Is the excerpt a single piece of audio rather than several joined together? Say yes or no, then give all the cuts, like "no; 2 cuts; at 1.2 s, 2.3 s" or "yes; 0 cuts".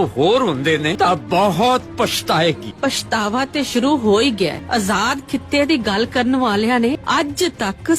no; 4 cuts; at 0.9 s, 2.7 s, 4.6 s, 6.9 s